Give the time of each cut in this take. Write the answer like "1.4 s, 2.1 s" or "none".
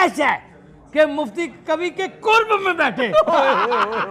none